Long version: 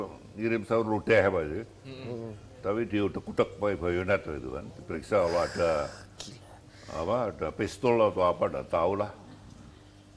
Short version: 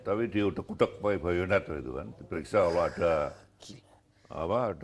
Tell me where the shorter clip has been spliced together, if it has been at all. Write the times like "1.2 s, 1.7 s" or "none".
none